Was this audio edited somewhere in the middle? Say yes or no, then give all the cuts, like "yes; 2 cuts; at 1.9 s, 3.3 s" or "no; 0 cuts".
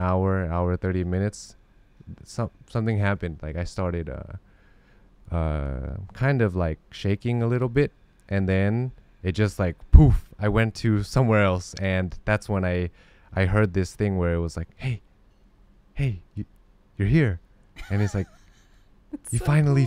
no; 0 cuts